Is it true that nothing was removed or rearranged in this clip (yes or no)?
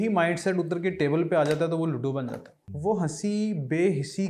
no